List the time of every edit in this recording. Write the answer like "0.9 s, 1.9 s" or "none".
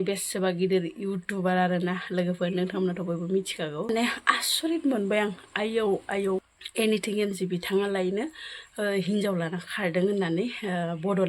3.9 s, 6.4 s